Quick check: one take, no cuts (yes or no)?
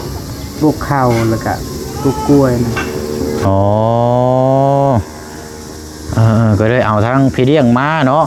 yes